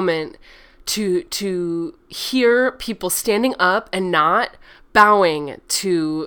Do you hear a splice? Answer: no; 0 cuts

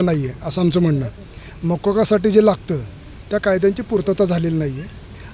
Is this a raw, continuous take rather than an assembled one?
yes; 0 cuts

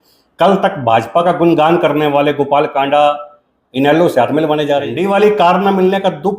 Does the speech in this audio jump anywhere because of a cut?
yes; 1 cut; at 5.0 s

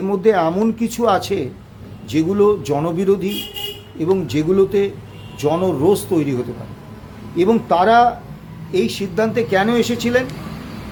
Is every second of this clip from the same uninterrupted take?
yes; 0 cuts

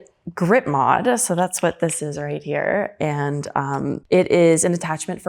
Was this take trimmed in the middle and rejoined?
no; 0 cuts

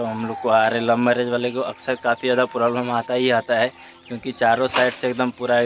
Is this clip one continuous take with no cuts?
yes; 0 cuts

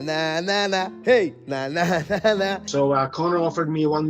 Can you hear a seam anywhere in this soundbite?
yes; 1 cut; at 2.7 s

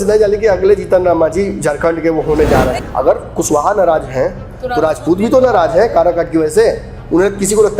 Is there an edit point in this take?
yes; 1 cut; at 2.8 s

